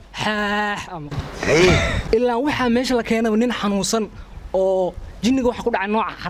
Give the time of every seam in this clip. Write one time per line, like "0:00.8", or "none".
0:02.0